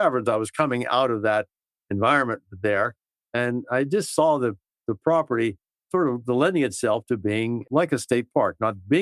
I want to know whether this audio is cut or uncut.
cut